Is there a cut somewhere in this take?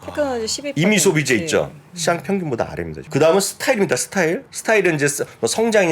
yes; 2 cuts; at 3.0 s, 4.5 s

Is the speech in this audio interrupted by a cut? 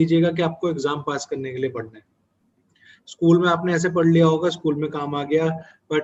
no; 0 cuts

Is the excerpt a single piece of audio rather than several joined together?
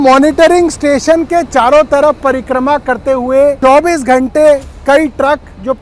yes; 0 cuts

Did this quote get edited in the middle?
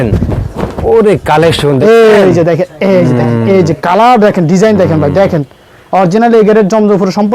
no; 0 cuts

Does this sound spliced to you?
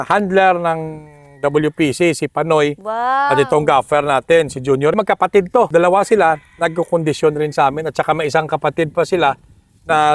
yes; 1 cut; at 5.0 s

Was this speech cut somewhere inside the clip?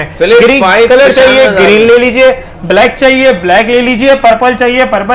no; 0 cuts

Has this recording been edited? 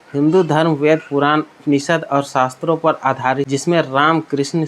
yes; 1 cut; at 3.5 s

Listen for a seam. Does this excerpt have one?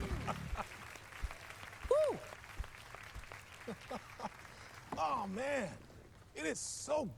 no; 0 cuts

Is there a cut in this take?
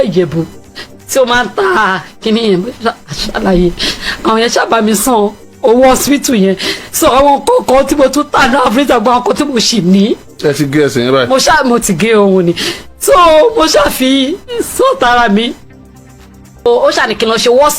yes; 1 cut; at 16.7 s

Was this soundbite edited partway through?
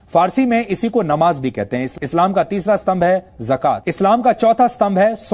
yes; 2 cuts; at 1.9 s, 3.9 s

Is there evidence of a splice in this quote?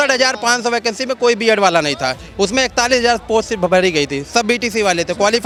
no; 0 cuts

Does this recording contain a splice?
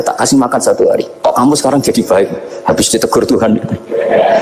yes; 1 cut; at 1.1 s

